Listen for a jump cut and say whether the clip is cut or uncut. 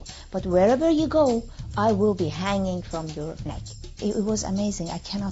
cut